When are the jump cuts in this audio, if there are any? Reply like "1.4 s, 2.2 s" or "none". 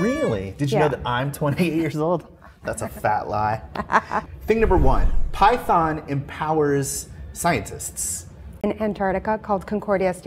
8.6 s

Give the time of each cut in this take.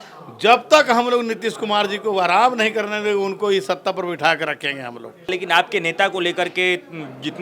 5.3 s

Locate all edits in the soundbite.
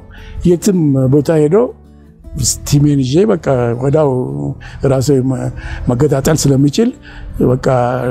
none

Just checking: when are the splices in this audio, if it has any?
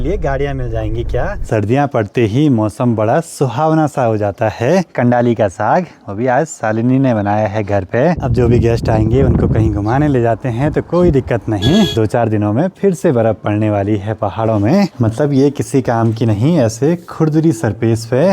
1.4 s, 4.9 s, 8.2 s, 11.9 s, 14.9 s

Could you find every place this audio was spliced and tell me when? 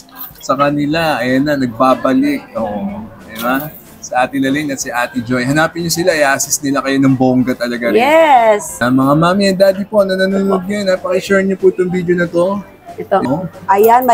8.7 s, 13.2 s

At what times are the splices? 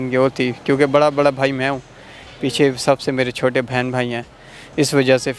none

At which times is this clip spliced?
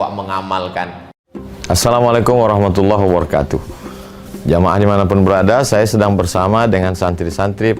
1.1 s

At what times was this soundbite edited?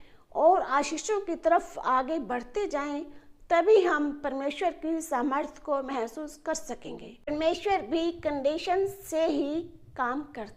7.3 s

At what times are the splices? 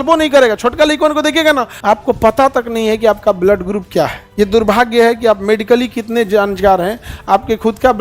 1.7 s, 4.2 s

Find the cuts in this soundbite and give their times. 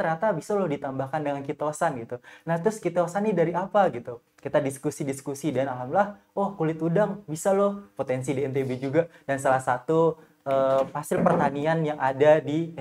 none

